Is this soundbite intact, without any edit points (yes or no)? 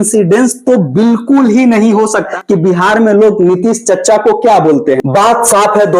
no